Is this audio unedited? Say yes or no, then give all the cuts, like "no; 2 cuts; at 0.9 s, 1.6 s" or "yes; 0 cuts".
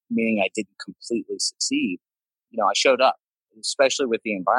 no; 2 cuts; at 2.4 s, 3.5 s